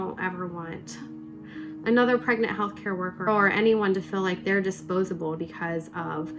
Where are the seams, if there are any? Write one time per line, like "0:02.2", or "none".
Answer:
0:05.4